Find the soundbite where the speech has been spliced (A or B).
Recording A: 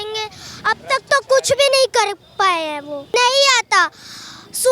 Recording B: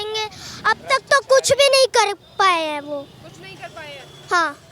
A